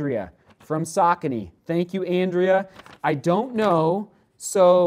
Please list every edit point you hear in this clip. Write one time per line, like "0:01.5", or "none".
none